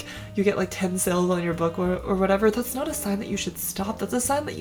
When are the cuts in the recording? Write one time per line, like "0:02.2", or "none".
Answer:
none